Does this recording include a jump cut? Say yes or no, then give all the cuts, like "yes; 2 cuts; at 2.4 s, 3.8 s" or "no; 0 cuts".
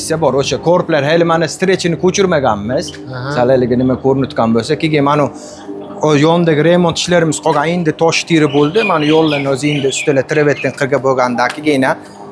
no; 0 cuts